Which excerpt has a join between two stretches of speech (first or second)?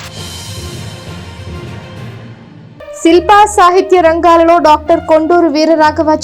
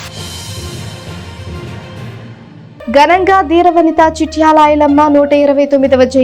second